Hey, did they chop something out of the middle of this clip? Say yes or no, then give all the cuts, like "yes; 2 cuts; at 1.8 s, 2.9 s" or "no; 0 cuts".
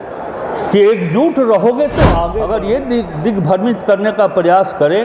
yes; 1 cut; at 2.3 s